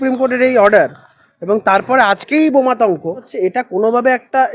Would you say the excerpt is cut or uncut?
cut